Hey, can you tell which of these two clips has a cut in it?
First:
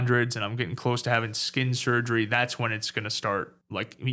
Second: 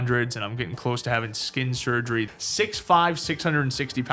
second; 1 cut; at 2.3 s

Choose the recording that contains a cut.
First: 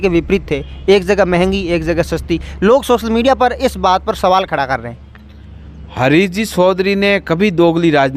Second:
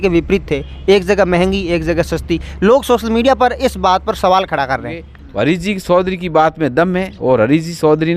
second; 1 cut; at 5.2 s

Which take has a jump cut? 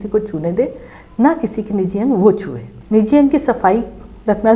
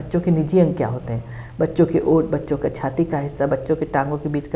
first; 1 cut; at 2.7 s

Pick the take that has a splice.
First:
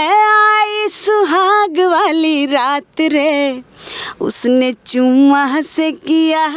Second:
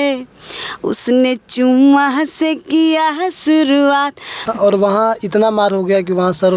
second; 1 cut; at 4.4 s

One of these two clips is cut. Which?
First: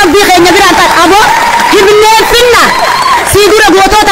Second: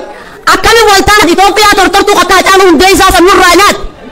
second; 1 cut; at 1.2 s

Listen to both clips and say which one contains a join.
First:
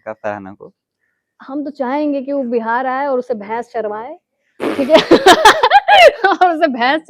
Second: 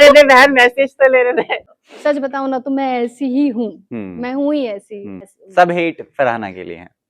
second; 2 cuts; at 1.8 s, 5.2 s

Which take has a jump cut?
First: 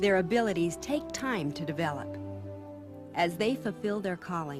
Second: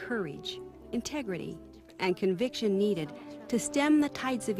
first; 1 cut; at 1.0 s

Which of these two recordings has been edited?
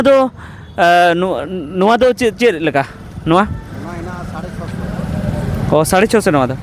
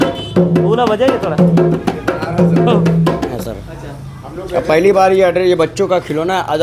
second; 1 cut; at 3.3 s

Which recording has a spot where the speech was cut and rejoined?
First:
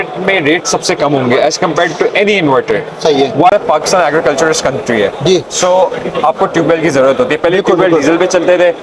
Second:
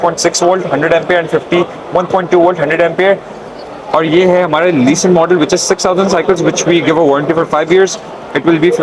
first; 1 cut; at 3.5 s

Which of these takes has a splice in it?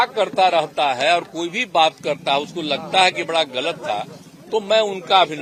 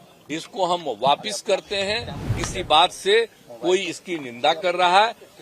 second; 1 cut; at 2.4 s

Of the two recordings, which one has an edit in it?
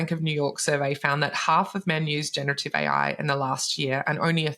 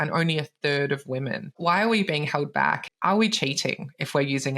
second; 2 cuts; at 1.6 s, 2.8 s

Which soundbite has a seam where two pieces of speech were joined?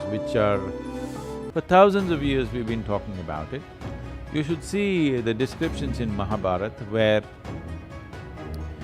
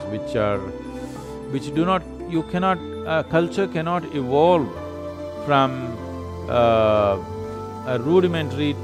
first; 1 cut; at 1.4 s

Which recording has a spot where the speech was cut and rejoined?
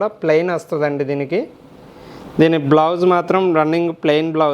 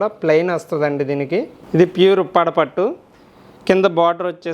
second; 1 cut; at 1.6 s

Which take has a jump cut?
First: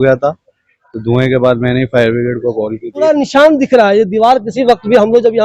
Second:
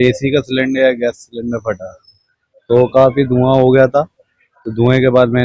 first; 1 cut; at 3.0 s

